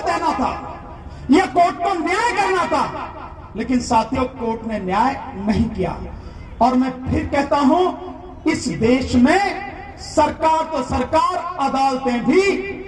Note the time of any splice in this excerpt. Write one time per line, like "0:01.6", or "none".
none